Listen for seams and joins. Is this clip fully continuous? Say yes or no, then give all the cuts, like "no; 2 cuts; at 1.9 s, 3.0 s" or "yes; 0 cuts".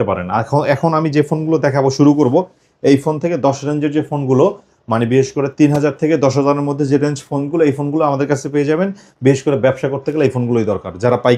yes; 0 cuts